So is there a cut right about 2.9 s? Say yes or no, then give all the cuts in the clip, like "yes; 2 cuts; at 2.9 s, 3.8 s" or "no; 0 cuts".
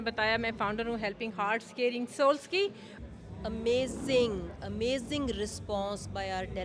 yes; 1 cut; at 2.9 s